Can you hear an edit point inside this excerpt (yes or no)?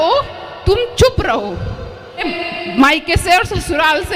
yes